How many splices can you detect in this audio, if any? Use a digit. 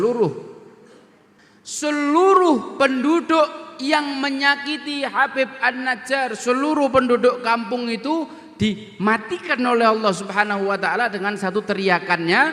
1